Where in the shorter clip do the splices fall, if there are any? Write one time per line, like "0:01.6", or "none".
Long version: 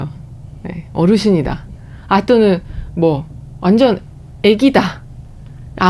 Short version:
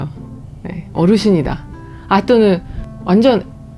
0:02.8